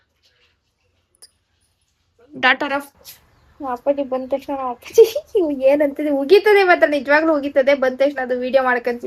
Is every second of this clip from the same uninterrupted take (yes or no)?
no